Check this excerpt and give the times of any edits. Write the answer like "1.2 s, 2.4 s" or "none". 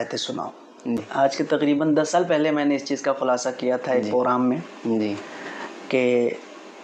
1.1 s